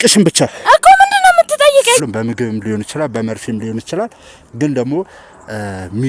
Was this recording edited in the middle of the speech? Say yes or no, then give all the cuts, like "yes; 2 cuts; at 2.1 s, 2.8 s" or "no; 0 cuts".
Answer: yes; 1 cut; at 2.0 s